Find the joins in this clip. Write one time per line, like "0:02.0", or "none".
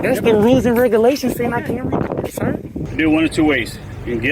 0:02.7